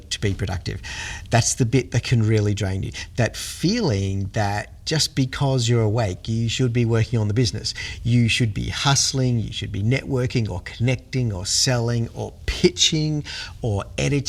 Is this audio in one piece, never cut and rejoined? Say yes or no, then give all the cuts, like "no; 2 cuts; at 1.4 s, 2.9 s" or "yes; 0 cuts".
yes; 0 cuts